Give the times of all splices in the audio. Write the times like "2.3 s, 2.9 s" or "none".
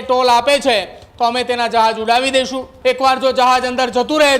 2.7 s